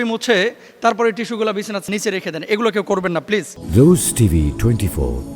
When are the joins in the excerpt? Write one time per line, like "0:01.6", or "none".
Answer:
0:01.9
0:03.6